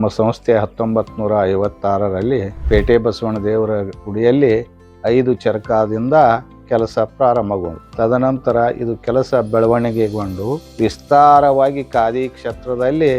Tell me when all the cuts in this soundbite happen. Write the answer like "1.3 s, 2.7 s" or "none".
2.5 s, 7.8 s, 10.6 s